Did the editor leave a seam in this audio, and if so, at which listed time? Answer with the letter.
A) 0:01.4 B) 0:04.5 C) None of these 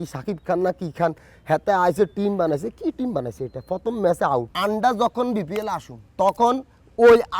B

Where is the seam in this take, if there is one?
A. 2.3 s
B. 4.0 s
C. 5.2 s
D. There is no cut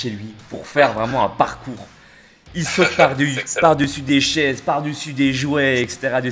D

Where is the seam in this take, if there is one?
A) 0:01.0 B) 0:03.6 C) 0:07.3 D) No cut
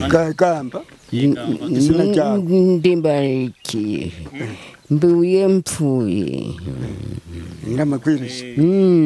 D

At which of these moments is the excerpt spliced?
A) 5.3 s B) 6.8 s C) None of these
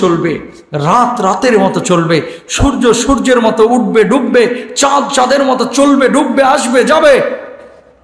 C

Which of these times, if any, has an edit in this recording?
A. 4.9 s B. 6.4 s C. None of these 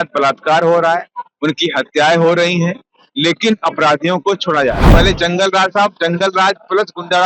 A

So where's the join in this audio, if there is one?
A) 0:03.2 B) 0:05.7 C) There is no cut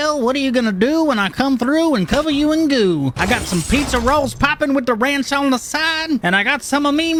C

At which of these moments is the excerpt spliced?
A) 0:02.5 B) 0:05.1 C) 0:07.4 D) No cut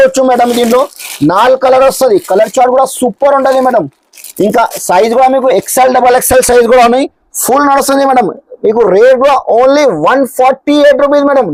D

